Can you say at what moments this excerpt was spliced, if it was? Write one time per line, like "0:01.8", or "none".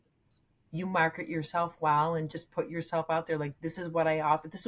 none